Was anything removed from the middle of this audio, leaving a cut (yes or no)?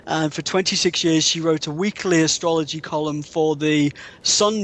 no